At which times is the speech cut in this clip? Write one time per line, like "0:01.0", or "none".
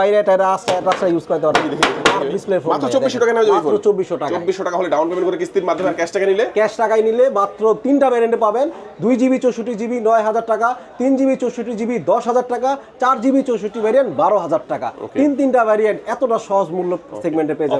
none